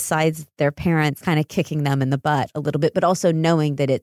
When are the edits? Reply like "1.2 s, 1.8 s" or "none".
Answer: 1.2 s